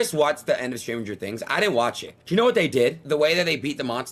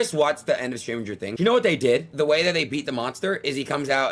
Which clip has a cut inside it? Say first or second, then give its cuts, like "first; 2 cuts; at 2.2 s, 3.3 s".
second; 1 cut; at 1.2 s